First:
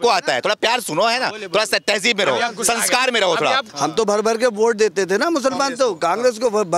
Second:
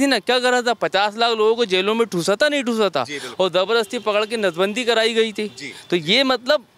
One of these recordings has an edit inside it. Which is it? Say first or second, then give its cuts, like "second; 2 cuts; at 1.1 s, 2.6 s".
first; 1 cut; at 3.6 s